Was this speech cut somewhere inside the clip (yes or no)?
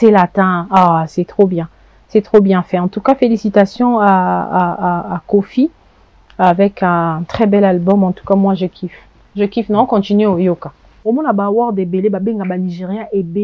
yes